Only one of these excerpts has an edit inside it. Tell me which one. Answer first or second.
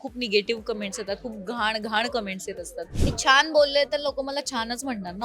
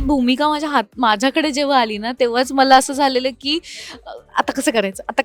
first